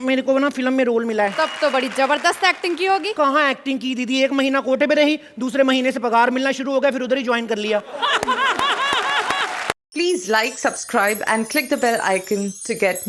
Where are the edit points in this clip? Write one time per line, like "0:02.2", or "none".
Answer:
0:01.3
0:03.1
0:09.8